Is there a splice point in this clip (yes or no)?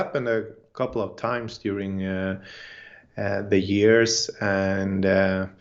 no